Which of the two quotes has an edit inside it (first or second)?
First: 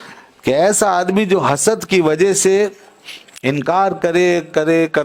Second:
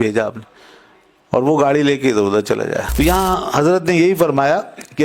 second